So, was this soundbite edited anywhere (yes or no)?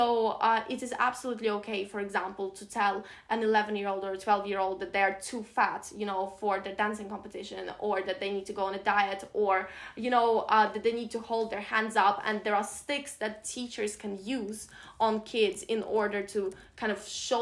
no